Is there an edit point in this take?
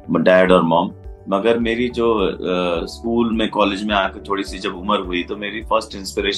no; 0 cuts

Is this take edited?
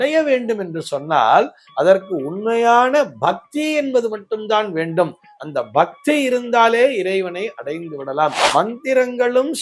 yes; 1 cut; at 8.4 s

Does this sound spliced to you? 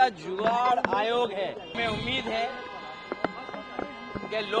yes; 1 cut; at 1.8 s

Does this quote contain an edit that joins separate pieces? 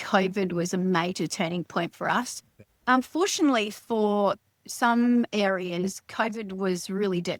no; 0 cuts

